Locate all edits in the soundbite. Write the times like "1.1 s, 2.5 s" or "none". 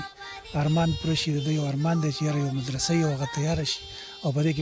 none